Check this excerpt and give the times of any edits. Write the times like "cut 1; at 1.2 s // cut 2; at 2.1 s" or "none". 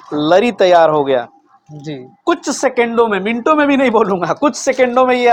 none

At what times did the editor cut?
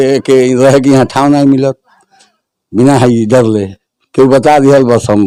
none

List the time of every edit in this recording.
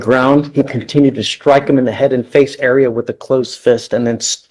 none

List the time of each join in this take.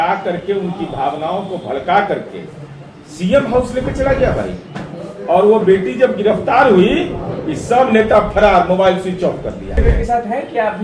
cut 1; at 9.8 s

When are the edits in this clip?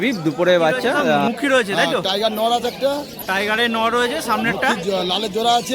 cut 1; at 1.2 s

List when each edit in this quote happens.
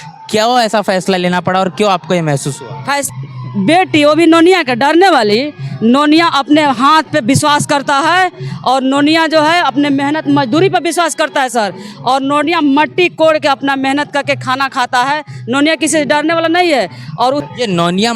cut 1; at 3.1 s // cut 2; at 17.4 s

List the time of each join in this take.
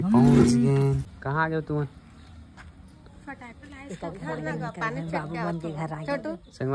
cut 1; at 1.1 s

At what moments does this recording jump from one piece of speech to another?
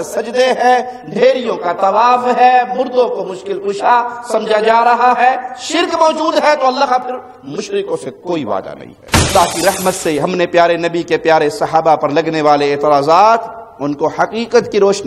cut 1; at 9.3 s

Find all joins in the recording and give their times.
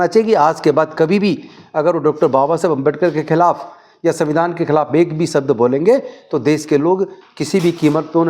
none

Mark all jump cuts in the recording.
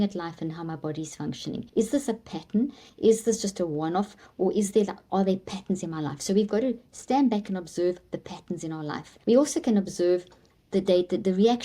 cut 1; at 1.7 s // cut 2; at 9.1 s

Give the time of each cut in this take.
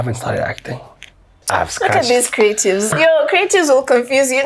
cut 1; at 1.4 s // cut 2; at 2.9 s

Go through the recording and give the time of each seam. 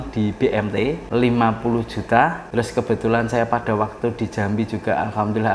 cut 1; at 1.0 s // cut 2; at 2.4 s

